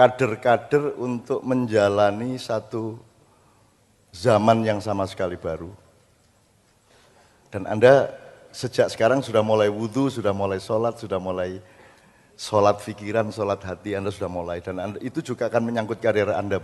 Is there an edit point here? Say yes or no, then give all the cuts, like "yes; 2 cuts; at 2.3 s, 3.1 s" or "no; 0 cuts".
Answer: no; 0 cuts